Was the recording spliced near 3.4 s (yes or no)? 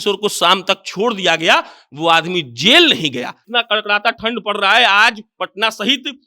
yes